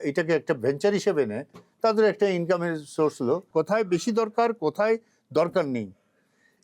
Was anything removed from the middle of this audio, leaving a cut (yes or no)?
yes